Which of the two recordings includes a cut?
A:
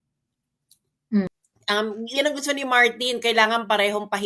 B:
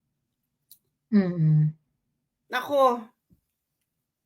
A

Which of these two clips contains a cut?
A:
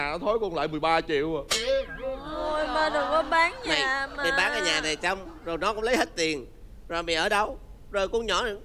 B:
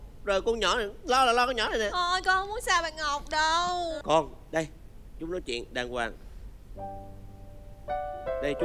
B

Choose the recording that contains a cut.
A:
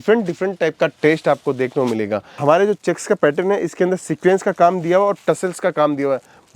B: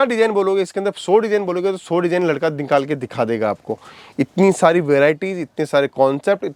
A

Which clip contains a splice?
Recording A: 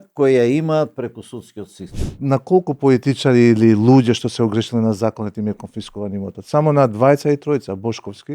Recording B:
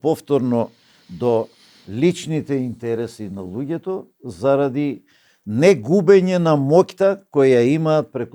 A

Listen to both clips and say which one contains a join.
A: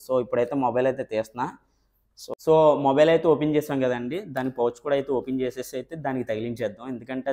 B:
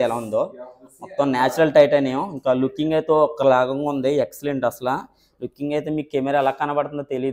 A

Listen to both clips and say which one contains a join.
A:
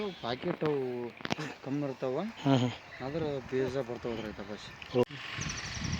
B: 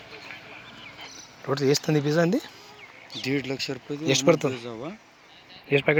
A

